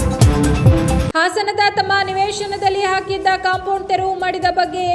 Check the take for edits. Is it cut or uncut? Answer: uncut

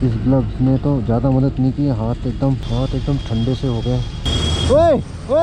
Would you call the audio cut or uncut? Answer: cut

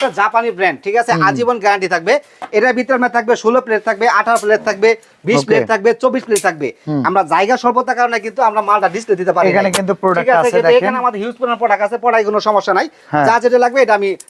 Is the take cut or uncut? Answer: uncut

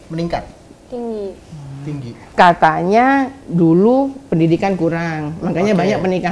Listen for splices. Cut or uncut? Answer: uncut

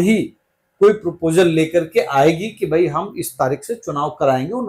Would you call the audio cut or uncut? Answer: uncut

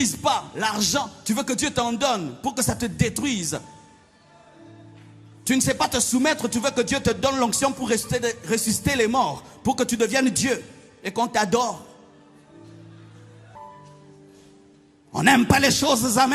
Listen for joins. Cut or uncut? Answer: cut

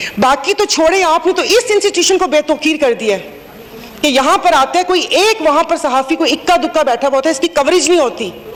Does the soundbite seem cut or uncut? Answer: uncut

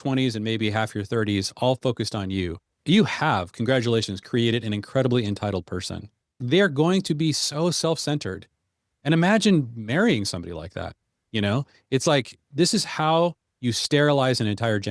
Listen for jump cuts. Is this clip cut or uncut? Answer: cut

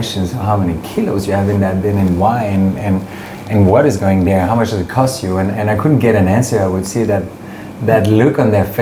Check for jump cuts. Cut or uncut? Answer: uncut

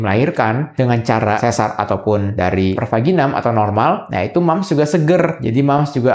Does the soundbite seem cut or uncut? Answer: uncut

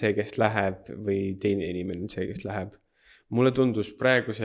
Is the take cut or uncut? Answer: uncut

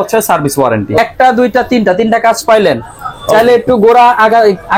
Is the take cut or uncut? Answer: cut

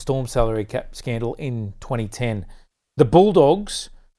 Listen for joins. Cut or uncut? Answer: uncut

